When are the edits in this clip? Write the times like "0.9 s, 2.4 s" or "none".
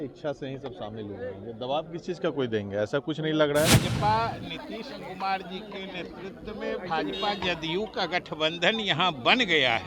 3.7 s